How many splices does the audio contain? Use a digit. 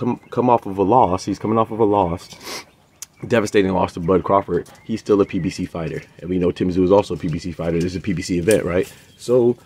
0